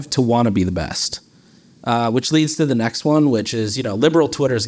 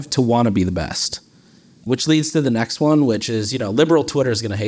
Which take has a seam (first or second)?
second